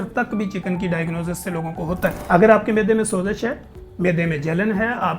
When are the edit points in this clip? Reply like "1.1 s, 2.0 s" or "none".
2.2 s